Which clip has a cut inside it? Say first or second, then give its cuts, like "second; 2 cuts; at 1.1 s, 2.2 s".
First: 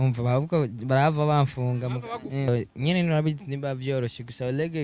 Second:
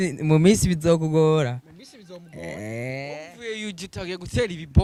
first; 1 cut; at 2.5 s